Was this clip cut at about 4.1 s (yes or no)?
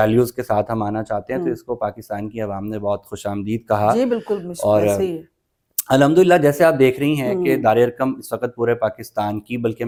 no